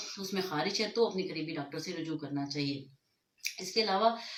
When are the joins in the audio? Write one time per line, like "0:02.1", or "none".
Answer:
none